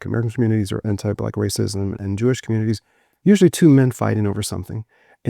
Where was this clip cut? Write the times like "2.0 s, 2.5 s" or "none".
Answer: 2.0 s